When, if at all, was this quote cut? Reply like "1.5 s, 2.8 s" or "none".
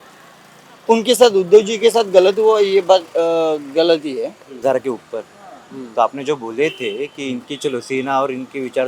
4.6 s